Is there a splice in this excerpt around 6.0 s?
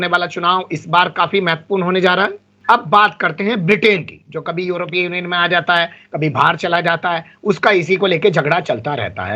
no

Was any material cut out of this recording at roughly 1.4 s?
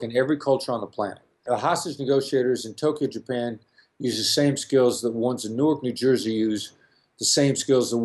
yes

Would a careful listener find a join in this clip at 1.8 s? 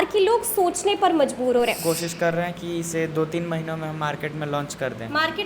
yes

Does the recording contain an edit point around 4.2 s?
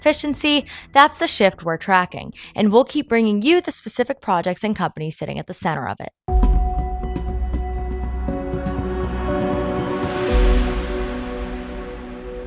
no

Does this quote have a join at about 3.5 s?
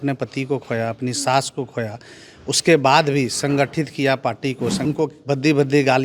no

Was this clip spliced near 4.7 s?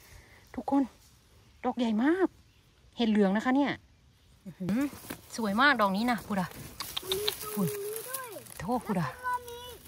yes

